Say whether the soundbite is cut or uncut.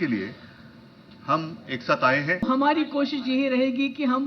cut